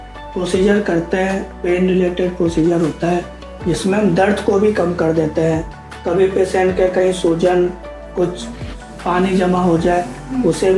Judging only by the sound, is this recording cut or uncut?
uncut